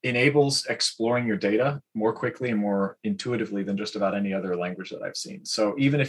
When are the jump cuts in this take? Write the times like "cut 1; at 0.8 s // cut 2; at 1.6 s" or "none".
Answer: none